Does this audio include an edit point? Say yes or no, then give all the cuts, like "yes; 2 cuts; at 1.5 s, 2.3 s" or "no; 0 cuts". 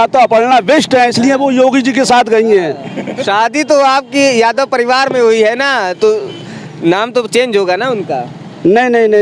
no; 0 cuts